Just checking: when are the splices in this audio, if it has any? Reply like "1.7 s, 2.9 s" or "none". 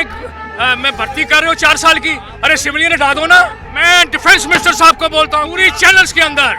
3.7 s, 5.5 s